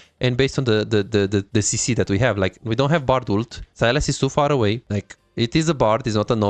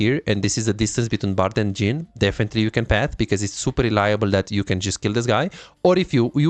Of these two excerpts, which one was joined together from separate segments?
first; 2 cuts; at 3.6 s, 4.8 s

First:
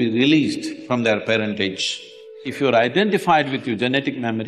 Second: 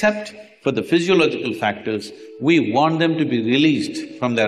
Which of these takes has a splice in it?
first; 1 cut; at 2.4 s

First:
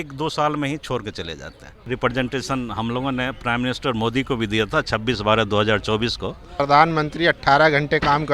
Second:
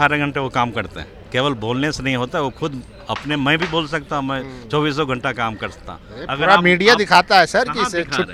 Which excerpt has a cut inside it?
first; 2 cuts; at 1.9 s, 6.6 s

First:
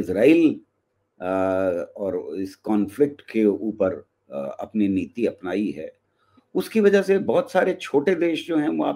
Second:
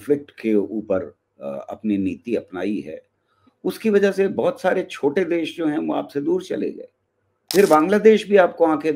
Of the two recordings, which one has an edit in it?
second; 1 cut; at 7.5 s

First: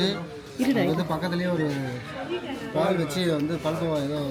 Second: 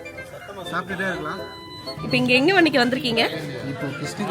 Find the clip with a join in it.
second; 1 cut; at 2.0 s

